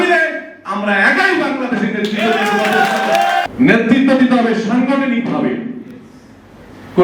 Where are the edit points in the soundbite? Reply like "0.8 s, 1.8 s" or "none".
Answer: 3.5 s